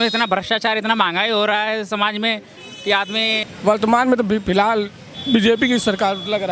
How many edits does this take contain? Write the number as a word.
one